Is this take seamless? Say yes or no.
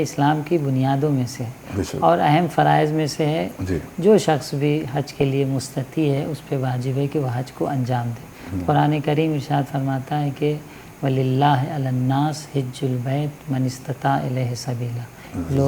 yes